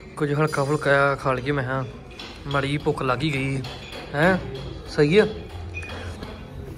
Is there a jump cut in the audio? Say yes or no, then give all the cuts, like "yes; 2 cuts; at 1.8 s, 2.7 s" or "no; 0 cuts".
no; 0 cuts